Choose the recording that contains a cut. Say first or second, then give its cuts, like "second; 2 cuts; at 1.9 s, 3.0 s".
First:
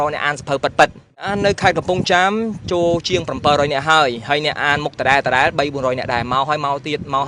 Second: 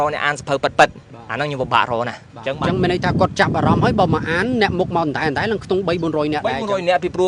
first; 1 cut; at 1.3 s